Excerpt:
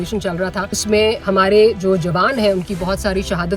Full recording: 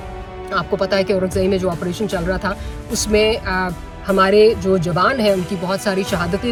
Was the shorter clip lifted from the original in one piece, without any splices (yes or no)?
no